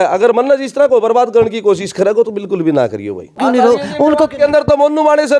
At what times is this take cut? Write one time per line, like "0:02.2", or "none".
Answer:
0:03.4